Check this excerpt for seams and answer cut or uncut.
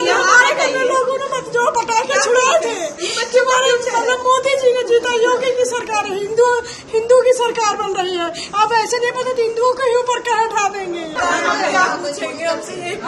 uncut